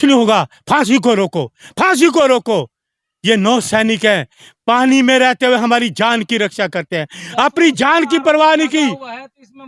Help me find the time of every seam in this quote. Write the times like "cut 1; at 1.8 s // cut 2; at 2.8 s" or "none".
none

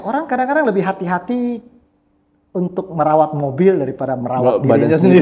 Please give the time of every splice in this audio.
none

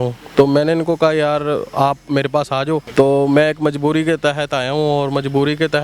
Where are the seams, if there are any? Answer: cut 1; at 2.9 s

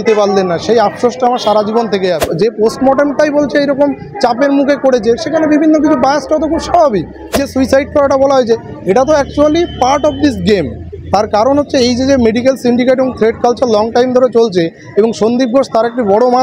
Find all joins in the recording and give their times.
cut 1; at 2.3 s // cut 2; at 7.4 s

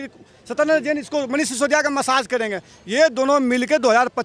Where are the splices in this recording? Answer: none

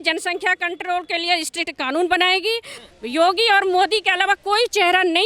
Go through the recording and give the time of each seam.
cut 1; at 2.7 s

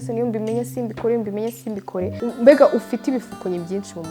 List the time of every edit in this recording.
cut 1; at 2.1 s

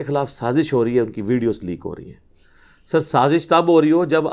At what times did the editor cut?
none

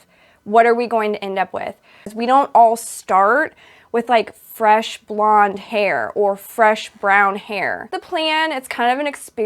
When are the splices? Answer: cut 1; at 2.1 s // cut 2; at 7.9 s

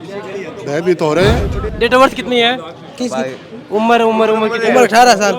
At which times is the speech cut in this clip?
cut 1; at 1.6 s

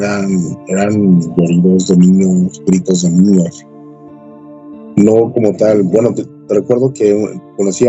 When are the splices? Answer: none

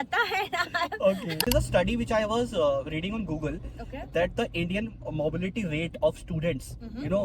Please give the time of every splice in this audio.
cut 1; at 1.4 s

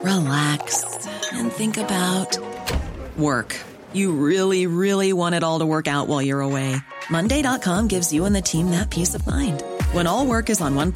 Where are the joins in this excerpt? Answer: none

